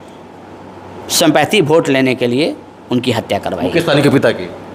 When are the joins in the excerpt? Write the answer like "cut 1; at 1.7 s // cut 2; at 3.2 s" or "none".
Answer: none